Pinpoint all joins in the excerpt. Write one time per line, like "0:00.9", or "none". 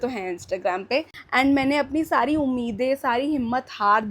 0:01.1